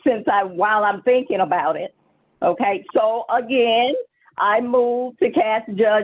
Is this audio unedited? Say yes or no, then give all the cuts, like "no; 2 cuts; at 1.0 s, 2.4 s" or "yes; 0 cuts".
yes; 0 cuts